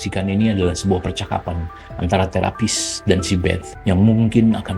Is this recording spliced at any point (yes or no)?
yes